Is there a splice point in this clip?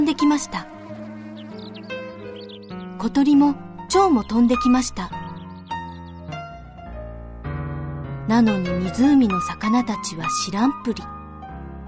no; 0 cuts

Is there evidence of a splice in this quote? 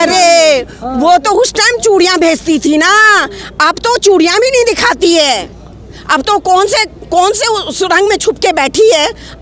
no; 0 cuts

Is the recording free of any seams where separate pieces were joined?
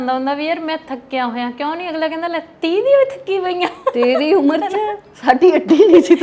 yes; 0 cuts

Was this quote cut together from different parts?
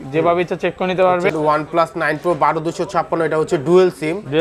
yes; 1 cut; at 1.3 s

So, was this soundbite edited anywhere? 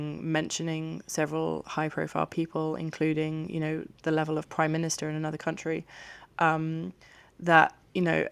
no; 0 cuts

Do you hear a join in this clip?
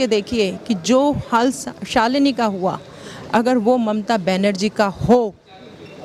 no; 0 cuts

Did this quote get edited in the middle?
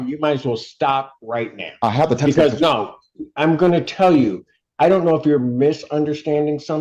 no; 0 cuts

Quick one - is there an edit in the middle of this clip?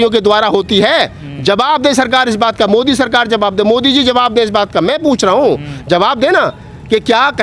no; 0 cuts

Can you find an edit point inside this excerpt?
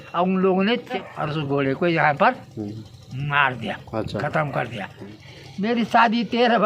yes; 2 cuts; at 1.1 s, 5.2 s

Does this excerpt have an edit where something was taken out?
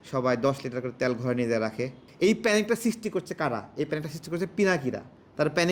yes; 1 cut; at 2.0 s

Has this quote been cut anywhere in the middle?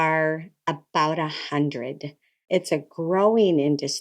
yes; 1 cut; at 2.5 s

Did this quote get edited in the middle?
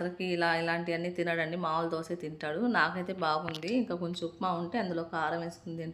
no; 0 cuts

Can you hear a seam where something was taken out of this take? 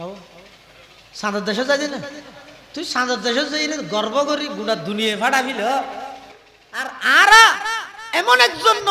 yes; 1 cut; at 6.2 s

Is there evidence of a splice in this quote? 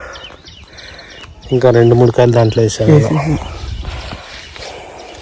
no; 0 cuts

